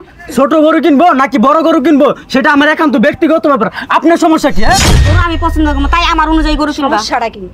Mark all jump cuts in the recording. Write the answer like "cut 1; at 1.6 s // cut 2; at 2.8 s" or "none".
cut 1; at 4.9 s